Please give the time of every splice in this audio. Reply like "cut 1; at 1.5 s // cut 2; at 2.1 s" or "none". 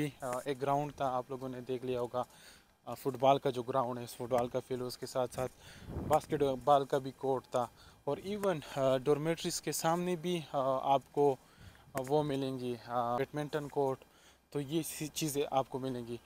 none